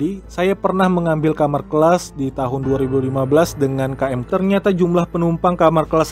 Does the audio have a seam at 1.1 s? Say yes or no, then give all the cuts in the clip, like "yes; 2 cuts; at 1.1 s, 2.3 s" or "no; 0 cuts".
no; 1 cut; at 4.2 s